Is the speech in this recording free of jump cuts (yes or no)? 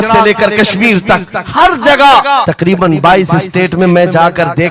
no